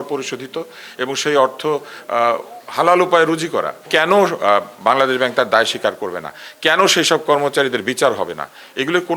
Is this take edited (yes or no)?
yes